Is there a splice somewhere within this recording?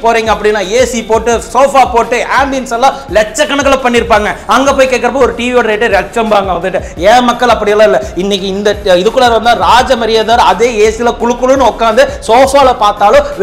no; 0 cuts

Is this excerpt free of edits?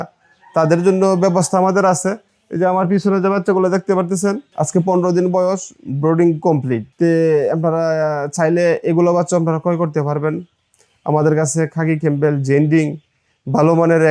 yes; 0 cuts

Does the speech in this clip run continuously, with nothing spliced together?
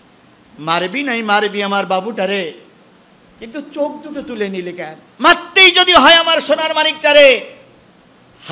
no; 1 cut; at 5.0 s

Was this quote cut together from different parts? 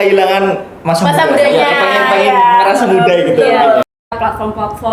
yes; 1 cut; at 4.0 s

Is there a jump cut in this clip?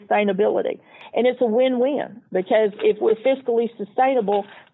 yes; 1 cut; at 0.9 s

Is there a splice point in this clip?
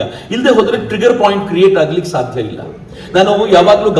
no; 0 cuts

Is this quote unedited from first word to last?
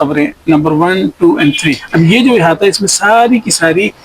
no; 1 cut; at 1.8 s

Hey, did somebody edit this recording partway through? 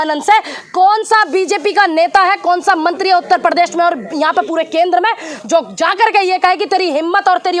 no; 0 cuts

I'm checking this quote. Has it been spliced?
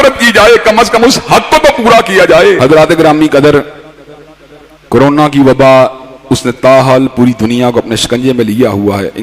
yes; 1 cut; at 2.6 s

